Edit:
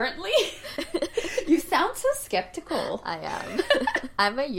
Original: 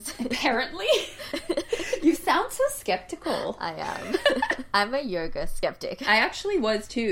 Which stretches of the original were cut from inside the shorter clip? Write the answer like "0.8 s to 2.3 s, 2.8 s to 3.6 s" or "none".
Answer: none

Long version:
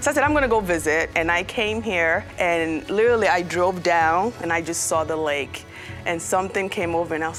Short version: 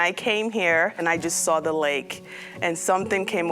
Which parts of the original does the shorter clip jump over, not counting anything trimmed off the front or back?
2.3 s to 4.4 s

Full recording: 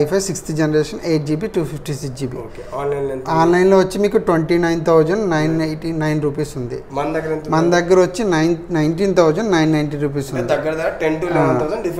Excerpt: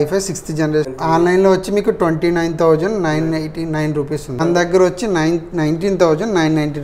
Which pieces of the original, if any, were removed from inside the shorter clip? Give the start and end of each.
0.9 s to 3.2 s, 6.7 s to 7.6 s

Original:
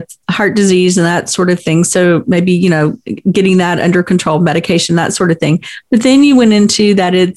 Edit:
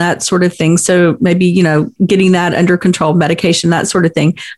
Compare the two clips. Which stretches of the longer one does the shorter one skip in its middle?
3.0 s to 3.2 s

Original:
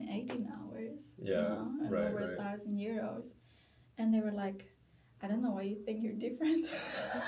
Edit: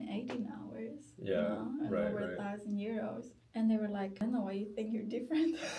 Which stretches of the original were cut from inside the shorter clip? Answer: 3.3 s to 3.8 s, 4.6 s to 5.2 s

